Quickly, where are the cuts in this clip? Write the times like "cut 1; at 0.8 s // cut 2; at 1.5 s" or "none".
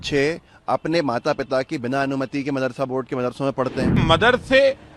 cut 1; at 4.0 s